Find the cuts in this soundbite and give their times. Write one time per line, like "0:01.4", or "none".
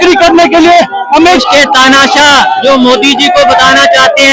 0:01.4